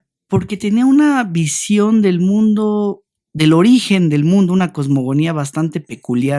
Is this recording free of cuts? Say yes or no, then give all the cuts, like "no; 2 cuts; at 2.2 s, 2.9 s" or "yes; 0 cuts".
yes; 0 cuts